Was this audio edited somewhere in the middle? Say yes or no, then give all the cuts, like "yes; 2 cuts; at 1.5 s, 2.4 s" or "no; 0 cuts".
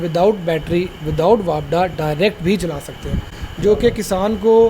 no; 0 cuts